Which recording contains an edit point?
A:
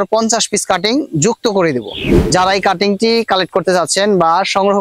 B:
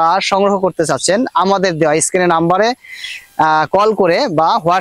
A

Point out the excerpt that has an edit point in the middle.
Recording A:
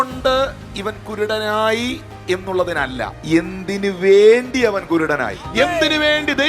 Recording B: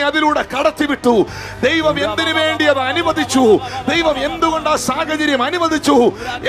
A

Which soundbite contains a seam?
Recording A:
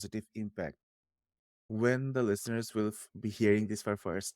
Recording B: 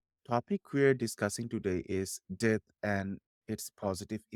A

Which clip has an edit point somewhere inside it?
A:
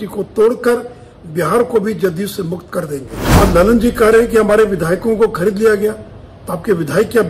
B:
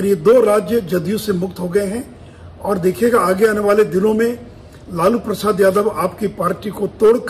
A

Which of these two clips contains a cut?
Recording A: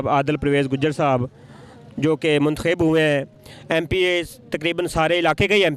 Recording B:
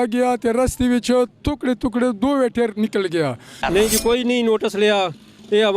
B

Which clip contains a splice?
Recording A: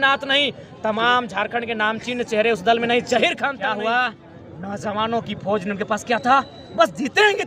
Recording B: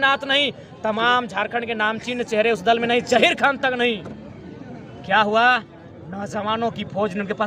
A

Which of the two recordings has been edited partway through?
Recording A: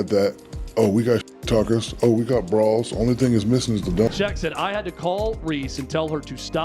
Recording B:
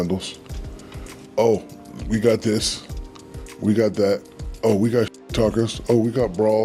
A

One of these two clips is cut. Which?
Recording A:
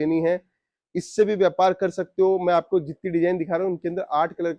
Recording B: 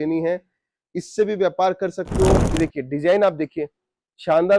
B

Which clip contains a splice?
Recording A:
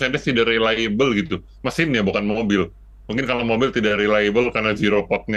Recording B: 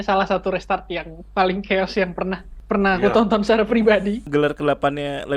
B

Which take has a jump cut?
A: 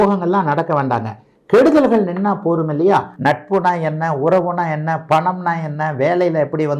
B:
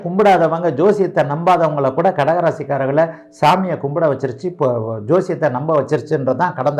A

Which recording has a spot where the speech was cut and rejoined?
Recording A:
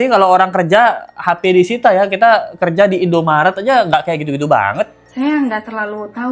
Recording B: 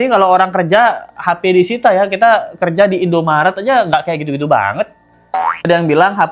A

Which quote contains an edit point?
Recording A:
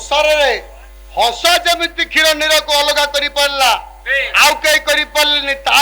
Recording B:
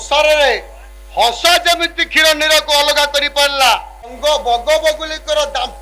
B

